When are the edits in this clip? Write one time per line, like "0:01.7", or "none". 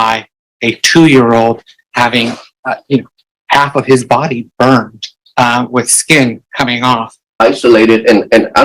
0:02.5
0:07.3